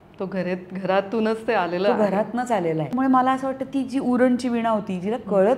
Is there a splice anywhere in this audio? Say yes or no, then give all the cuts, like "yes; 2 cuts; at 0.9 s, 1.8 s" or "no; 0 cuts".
no; 0 cuts